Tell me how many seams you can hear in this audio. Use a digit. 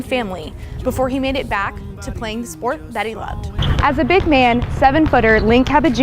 1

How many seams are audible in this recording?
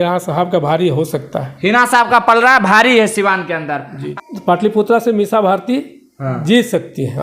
1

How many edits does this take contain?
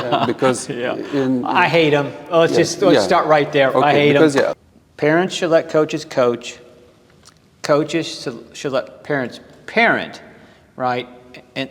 1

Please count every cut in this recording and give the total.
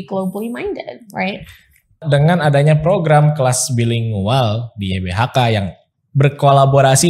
1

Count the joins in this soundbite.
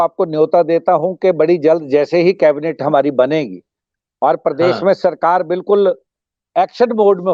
0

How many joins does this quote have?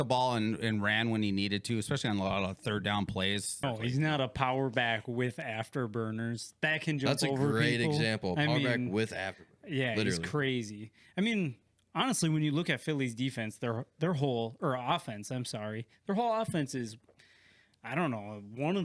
1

